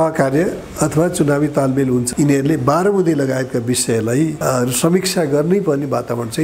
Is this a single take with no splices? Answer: no; 1 cut; at 2.1 s

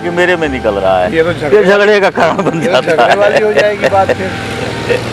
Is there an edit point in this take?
no; 0 cuts

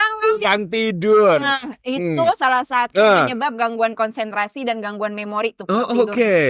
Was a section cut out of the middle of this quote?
no; 0 cuts

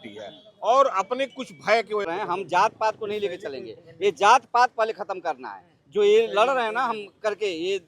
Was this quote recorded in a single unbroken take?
no; 1 cut; at 2.0 s

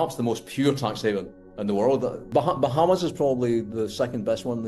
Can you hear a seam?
yes; 1 cut; at 2.2 s

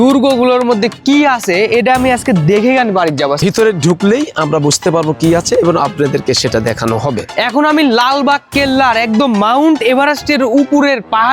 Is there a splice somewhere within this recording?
yes; 2 cuts; at 3.4 s, 7.3 s

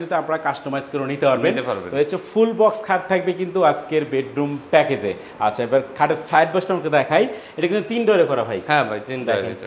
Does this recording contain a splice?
no; 0 cuts

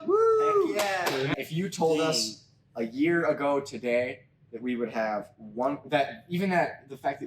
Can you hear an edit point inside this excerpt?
yes; 1 cut; at 1.3 s

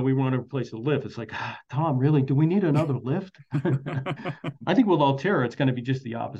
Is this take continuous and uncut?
no; 1 cut; at 4.6 s

